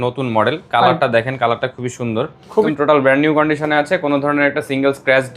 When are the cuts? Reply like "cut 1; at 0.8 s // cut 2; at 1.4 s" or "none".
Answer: cut 1; at 2.7 s